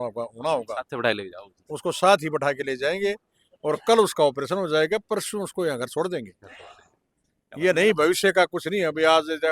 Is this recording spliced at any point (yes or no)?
no